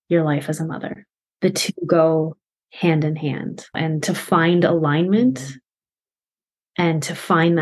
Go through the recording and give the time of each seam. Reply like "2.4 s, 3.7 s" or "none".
1.2 s, 3.8 s